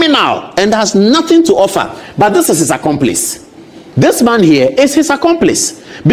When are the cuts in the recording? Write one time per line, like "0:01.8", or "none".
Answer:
none